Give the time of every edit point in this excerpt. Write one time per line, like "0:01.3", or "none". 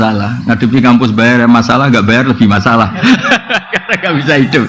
none